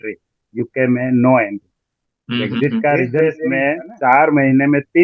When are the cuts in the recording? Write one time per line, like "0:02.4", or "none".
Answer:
0:03.2